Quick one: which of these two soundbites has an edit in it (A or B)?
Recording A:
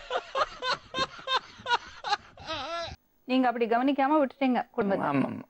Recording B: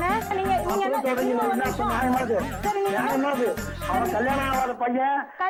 A